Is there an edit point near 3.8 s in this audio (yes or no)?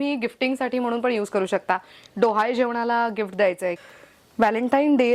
yes